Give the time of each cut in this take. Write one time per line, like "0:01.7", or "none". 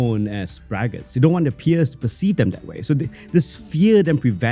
none